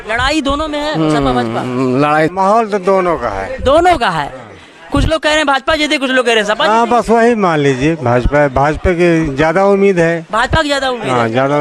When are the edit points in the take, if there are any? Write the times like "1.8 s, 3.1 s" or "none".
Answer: 2.3 s